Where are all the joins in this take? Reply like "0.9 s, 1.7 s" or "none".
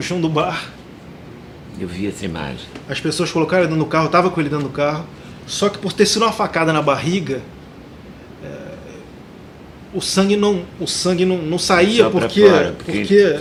none